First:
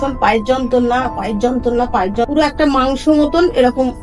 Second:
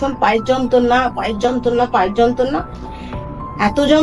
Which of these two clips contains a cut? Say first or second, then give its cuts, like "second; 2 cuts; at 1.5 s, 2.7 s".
first; 1 cut; at 2.2 s